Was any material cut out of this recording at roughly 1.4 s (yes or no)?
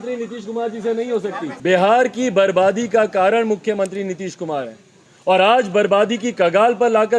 yes